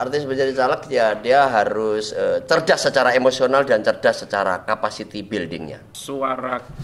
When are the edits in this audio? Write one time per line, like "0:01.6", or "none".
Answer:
0:05.9